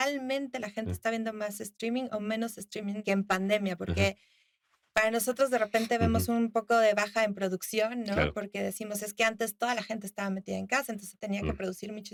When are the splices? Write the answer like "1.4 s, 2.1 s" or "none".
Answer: none